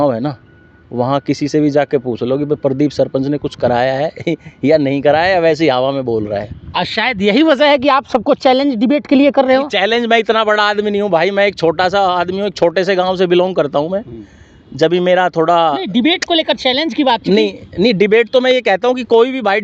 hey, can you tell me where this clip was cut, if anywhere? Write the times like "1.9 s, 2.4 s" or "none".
none